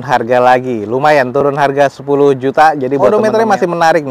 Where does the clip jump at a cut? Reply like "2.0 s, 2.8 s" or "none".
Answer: 3.1 s